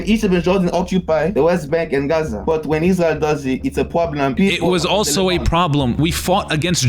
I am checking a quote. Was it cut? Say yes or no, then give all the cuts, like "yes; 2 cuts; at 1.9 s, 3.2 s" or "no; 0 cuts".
yes; 4 cuts; at 1.3 s, 2.4 s, 4.3 s, 6.0 s